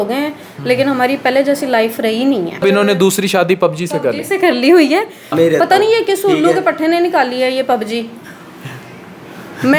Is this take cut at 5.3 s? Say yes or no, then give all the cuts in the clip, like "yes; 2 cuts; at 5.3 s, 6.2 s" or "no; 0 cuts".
yes; 2 cuts; at 2.6 s, 5.3 s